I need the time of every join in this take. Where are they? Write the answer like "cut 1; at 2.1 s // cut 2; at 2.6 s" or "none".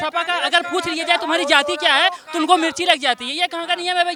none